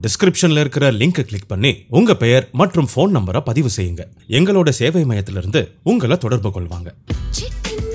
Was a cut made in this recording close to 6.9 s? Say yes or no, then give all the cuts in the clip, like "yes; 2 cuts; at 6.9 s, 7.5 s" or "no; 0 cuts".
yes; 1 cut; at 6.9 s